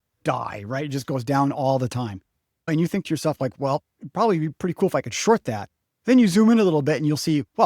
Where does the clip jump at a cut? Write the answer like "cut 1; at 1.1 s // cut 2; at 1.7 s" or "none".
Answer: cut 1; at 2.7 s